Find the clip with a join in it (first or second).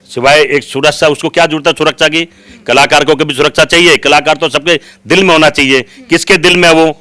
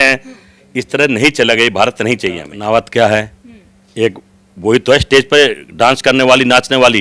second